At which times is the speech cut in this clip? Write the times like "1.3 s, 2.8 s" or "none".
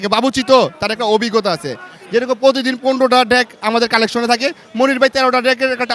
none